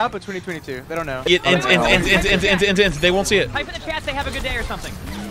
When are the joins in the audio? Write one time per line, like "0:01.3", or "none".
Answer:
0:01.2